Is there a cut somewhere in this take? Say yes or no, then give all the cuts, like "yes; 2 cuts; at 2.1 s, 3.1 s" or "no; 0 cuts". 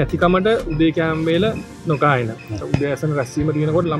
yes; 1 cut; at 2.6 s